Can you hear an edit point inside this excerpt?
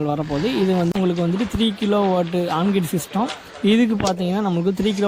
yes; 1 cut; at 0.9 s

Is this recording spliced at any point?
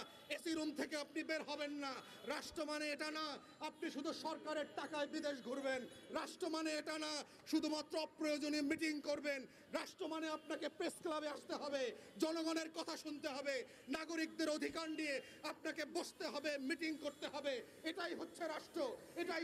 no; 0 cuts

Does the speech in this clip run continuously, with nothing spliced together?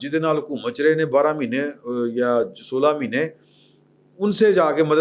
yes; 0 cuts

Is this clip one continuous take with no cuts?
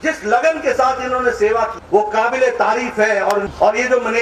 no; 2 cuts; at 1.8 s, 3.4 s

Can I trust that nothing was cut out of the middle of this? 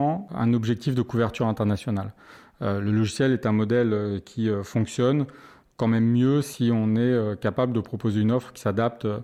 yes; 0 cuts

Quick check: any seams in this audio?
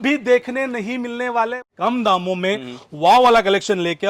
yes; 1 cut; at 1.6 s

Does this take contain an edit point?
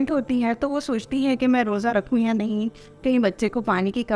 no; 0 cuts

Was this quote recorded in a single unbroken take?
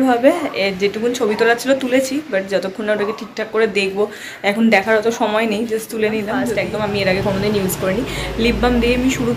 no; 1 cut; at 6.5 s

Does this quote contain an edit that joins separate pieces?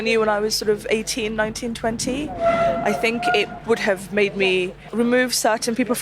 yes; 1 cut; at 4.8 s

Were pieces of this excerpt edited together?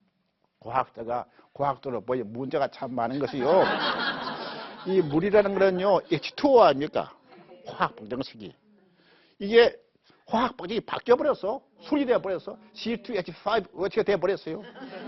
no; 0 cuts

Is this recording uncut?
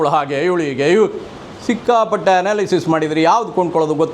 yes; 0 cuts

